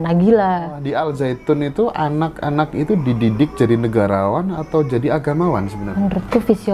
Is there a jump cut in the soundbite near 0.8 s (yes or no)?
yes